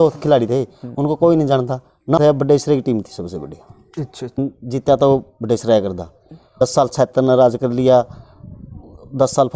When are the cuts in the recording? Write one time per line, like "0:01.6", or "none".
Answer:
0:02.2
0:04.4
0:06.6